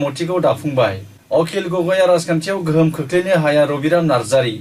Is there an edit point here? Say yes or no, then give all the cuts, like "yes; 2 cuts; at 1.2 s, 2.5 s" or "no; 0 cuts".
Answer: yes; 1 cut; at 1.1 s